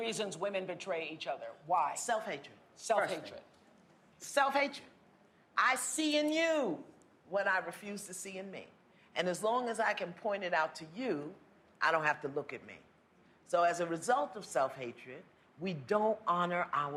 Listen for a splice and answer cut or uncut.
uncut